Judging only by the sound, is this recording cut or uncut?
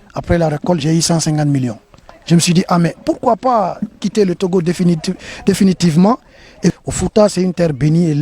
cut